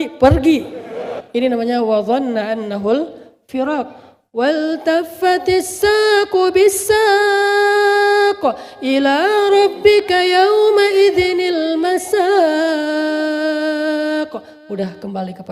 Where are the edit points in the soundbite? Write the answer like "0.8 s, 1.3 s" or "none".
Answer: 1.1 s